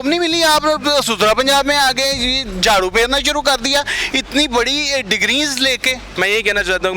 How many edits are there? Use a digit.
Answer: 1